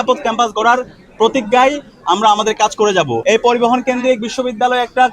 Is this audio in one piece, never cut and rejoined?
no; 1 cut; at 3.2 s

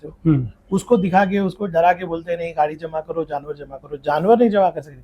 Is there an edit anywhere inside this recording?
no; 0 cuts

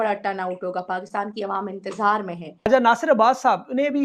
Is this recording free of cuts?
no; 1 cut; at 2.7 s

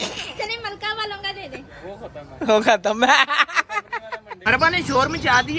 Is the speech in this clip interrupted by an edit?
yes; 1 cut; at 4.5 s

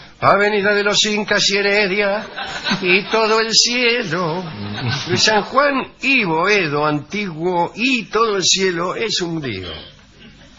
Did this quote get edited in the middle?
yes; 1 cut; at 1.2 s

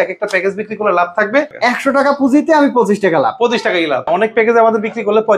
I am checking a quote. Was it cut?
yes; 2 cuts; at 1.5 s, 4.1 s

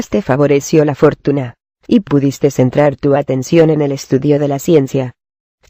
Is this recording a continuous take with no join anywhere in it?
yes; 0 cuts

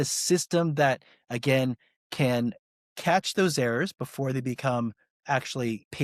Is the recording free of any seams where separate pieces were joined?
yes; 0 cuts

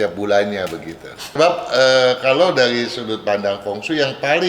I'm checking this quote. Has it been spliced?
yes; 1 cut; at 1.2 s

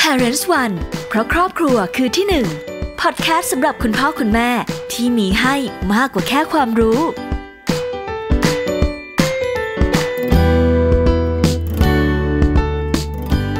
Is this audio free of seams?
yes; 0 cuts

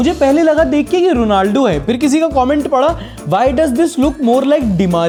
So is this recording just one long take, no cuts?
yes; 0 cuts

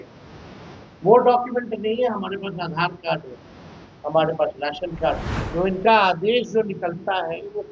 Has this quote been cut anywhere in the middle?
yes; 1 cut; at 5.3 s

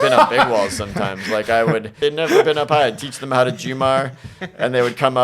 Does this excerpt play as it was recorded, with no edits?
no; 1 cut; at 2.0 s

